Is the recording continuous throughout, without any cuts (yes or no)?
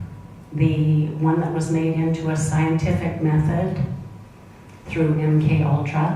yes